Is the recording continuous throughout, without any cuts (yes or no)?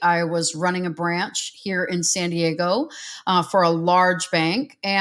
yes